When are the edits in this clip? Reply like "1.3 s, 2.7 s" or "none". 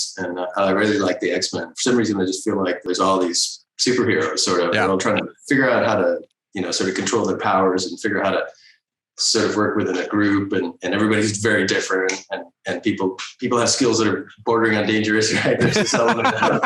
2.9 s